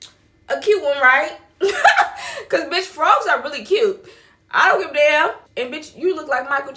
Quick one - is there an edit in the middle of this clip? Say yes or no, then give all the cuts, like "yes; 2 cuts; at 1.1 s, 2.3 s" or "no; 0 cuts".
no; 0 cuts